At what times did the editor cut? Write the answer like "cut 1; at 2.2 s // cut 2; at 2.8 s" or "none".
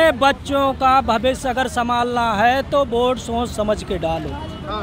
none